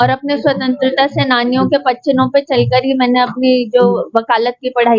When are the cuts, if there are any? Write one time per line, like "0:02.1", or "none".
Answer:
none